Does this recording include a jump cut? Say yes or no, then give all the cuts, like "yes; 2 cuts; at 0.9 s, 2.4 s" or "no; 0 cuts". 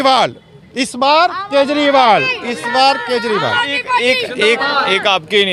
no; 0 cuts